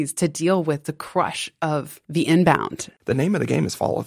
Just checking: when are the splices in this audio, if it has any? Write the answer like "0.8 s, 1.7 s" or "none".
2.0 s, 2.9 s